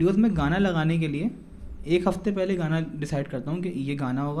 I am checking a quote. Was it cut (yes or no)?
no